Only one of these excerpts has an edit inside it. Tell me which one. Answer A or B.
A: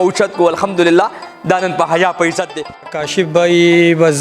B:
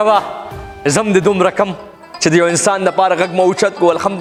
A